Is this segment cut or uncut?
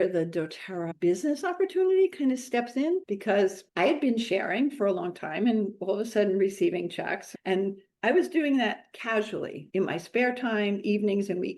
cut